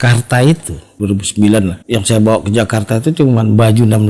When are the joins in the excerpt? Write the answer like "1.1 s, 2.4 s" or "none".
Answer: 0.9 s, 1.8 s

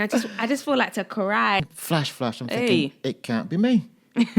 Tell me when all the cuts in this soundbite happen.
1.6 s

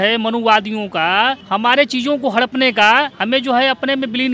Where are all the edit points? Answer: 1.4 s, 3.2 s

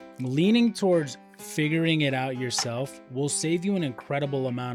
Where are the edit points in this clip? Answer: none

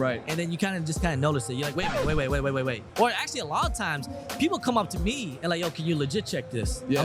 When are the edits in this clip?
2.8 s

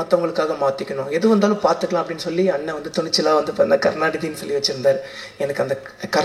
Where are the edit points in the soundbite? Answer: none

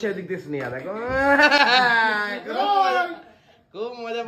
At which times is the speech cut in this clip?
none

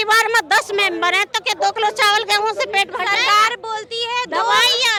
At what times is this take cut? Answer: none

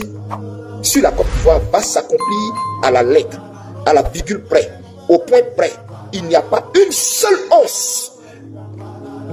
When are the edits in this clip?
none

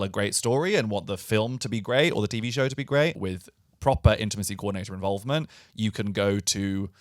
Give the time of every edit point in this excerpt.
3.2 s

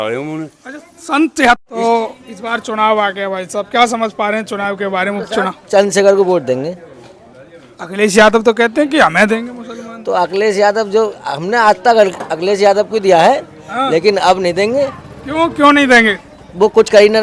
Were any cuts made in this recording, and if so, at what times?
1.6 s

